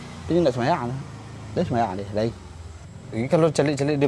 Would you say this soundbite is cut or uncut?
cut